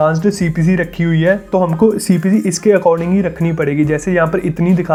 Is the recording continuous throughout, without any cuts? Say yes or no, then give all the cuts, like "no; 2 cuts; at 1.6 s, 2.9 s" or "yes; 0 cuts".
yes; 0 cuts